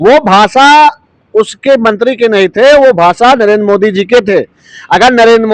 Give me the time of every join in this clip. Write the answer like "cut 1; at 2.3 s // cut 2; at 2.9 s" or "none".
none